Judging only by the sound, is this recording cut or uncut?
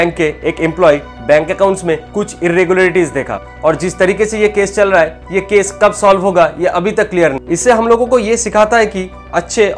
cut